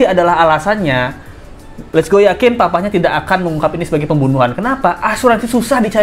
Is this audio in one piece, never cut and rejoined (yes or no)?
yes